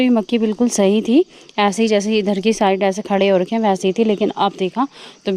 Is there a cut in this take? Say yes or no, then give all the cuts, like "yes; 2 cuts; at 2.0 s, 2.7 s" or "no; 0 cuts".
no; 0 cuts